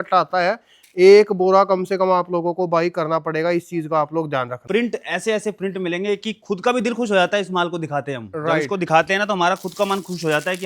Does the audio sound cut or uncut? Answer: cut